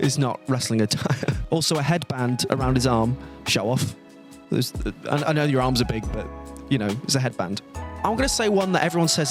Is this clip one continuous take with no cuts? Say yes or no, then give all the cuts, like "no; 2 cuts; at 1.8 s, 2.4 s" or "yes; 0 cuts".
yes; 0 cuts